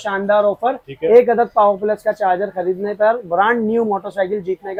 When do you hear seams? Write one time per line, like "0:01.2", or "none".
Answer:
none

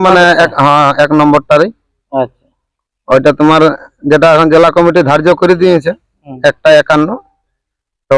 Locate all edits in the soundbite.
none

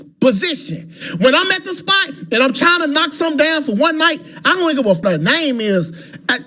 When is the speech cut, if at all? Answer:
0:05.0

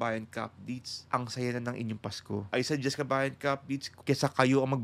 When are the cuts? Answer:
0:00.9
0:02.5
0:03.9

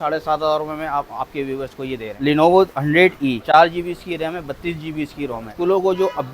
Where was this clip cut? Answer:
0:02.2
0:03.4
0:05.5

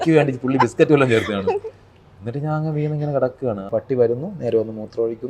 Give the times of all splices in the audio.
0:03.7

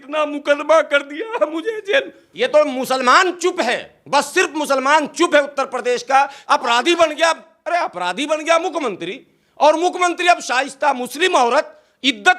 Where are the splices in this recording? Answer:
0:02.2
0:06.4

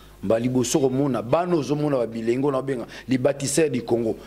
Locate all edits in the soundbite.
none

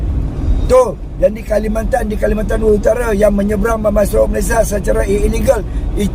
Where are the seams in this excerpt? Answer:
none

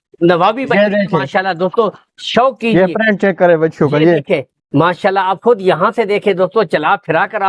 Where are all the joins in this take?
none

